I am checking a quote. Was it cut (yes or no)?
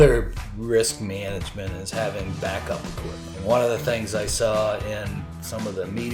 yes